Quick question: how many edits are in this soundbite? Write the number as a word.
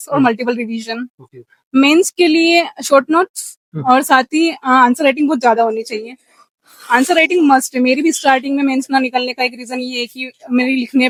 zero